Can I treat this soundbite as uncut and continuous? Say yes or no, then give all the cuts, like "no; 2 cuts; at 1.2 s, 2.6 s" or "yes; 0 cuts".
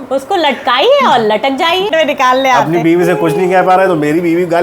no; 1 cut; at 1.9 s